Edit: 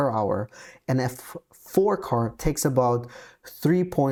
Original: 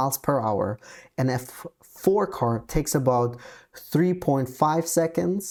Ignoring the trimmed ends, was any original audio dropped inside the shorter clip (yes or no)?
no